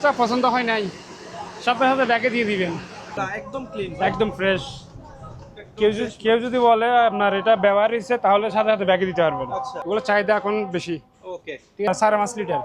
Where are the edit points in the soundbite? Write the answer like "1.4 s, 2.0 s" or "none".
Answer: 3.1 s, 9.7 s, 11.9 s